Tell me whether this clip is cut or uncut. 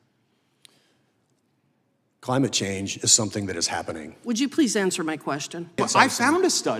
cut